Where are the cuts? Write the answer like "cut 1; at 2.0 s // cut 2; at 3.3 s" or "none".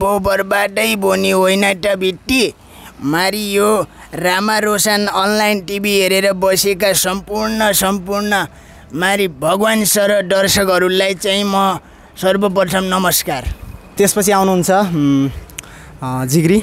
none